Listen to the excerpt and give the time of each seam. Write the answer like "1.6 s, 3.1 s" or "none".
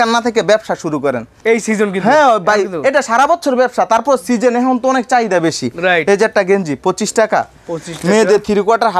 none